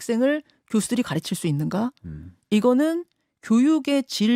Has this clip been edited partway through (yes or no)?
no